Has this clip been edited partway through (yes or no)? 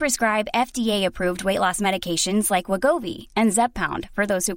no